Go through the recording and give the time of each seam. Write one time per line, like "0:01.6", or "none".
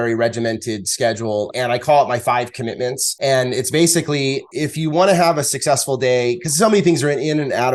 0:01.5
0:03.0
0:04.5